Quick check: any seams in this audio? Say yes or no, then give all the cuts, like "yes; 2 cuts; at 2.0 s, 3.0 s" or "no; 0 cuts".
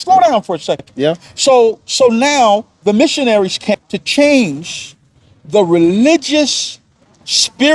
yes; 2 cuts; at 0.9 s, 3.6 s